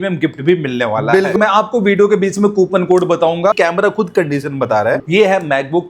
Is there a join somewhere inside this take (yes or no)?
yes